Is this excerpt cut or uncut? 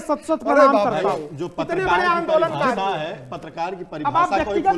uncut